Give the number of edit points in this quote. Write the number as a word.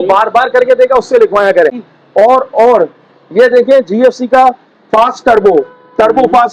one